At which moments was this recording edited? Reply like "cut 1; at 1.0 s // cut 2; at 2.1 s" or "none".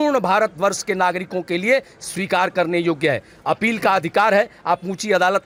none